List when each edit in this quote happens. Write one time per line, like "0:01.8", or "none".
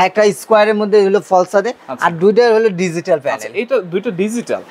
none